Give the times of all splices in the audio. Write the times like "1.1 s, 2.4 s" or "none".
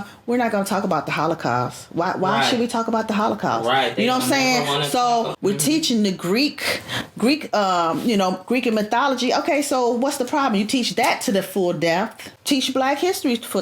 5.3 s, 12.3 s